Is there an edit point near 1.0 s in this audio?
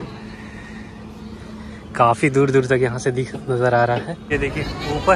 no; 1 cut; at 4.2 s

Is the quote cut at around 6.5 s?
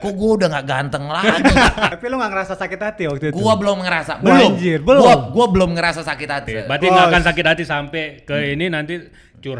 yes; 2 cuts; at 2.0 s, 6.5 s

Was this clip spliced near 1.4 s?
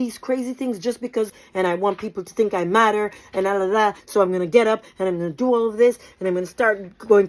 yes; 1 cut; at 1.4 s

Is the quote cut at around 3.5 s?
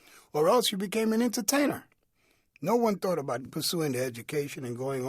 yes; 1 cut; at 3.5 s

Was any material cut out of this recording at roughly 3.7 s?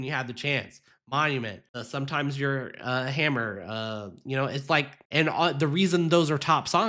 no; 2 cuts; at 1.7 s, 5.0 s

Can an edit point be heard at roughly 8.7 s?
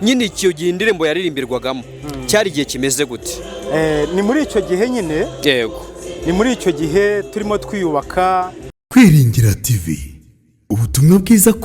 yes; 1 cut; at 8.7 s

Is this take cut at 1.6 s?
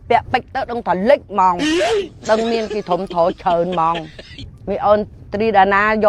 yes; 1 cut; at 1.6 s

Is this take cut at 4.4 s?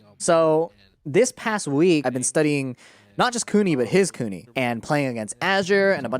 yes; 2 cuts; at 2.0 s, 4.4 s

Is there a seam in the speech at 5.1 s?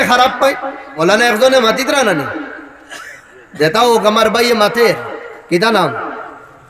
no; 1 cut; at 0.9 s

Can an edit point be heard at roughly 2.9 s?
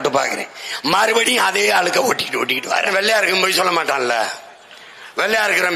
yes; 1 cut; at 2.9 s

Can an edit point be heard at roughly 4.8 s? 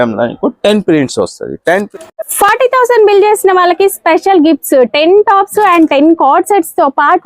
no; 1 cut; at 1.9 s

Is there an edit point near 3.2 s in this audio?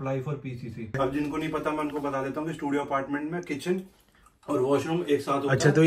no; 1 cut; at 1.0 s

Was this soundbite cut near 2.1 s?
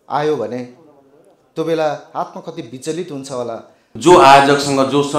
no; 1 cut; at 3.8 s

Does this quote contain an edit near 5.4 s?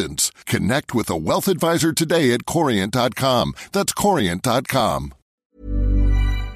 yes; 1 cut; at 5.4 s

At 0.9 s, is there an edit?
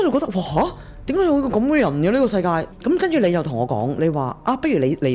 no; 1 cut; at 2.7 s

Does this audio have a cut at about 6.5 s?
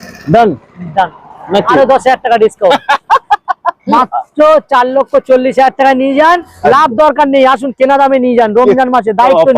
yes; 1 cut; at 6.5 s

